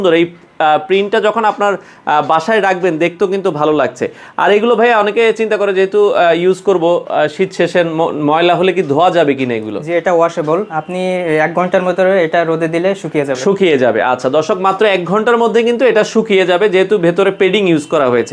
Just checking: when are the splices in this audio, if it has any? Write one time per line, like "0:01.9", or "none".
none